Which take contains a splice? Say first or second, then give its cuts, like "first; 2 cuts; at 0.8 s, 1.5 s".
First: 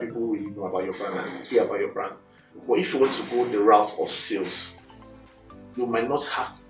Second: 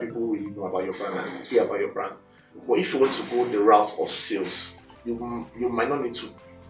second; 1 cut; at 4.9 s